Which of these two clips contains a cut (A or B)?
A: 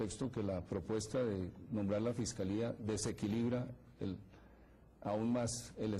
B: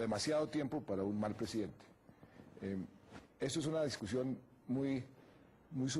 B